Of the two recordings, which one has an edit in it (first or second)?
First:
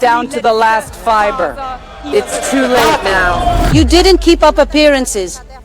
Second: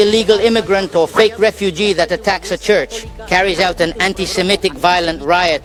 first